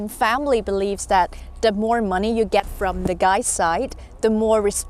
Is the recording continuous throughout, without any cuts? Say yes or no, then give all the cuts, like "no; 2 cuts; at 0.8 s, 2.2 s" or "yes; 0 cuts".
yes; 0 cuts